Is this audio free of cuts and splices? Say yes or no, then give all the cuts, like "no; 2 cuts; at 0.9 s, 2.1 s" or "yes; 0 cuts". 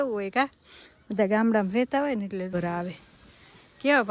no; 1 cut; at 2.5 s